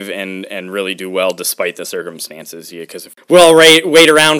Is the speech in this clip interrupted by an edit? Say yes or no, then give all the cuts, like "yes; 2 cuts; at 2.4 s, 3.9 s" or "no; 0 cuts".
yes; 1 cut; at 3.1 s